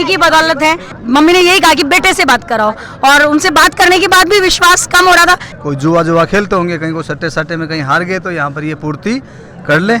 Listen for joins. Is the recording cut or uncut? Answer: cut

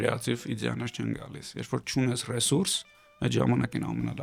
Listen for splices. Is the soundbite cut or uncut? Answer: uncut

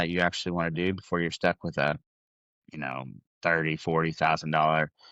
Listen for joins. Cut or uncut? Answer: uncut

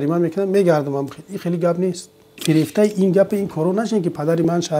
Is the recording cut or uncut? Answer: cut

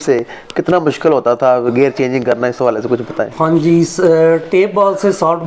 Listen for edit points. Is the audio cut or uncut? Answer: uncut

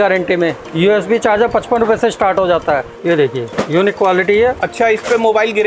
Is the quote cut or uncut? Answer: cut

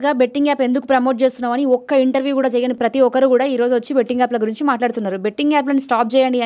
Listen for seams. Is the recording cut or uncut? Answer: uncut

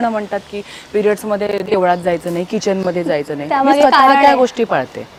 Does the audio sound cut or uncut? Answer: uncut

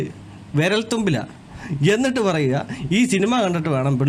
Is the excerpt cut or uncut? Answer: uncut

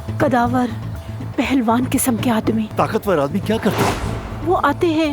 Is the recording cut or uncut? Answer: cut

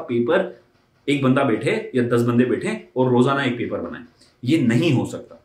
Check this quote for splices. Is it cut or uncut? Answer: uncut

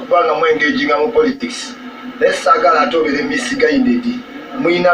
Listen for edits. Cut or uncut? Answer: uncut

